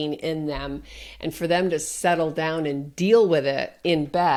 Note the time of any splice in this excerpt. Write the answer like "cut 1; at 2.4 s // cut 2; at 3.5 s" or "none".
none